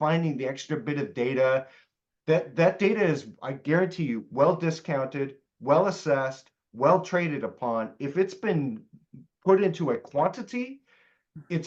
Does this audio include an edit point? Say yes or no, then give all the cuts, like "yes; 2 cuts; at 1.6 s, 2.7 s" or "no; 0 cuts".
no; 0 cuts